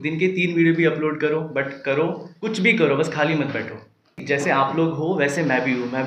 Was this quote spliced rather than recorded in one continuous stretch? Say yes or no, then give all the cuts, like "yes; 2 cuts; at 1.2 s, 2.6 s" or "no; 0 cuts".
yes; 1 cut; at 4.2 s